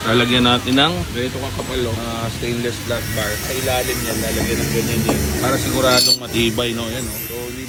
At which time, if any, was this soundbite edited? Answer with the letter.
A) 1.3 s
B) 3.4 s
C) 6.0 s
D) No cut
D